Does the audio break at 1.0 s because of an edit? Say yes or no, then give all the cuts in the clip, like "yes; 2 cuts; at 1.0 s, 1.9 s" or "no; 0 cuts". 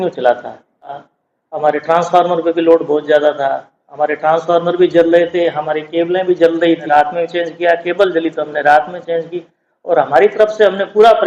yes; 2 cuts; at 1.0 s, 6.8 s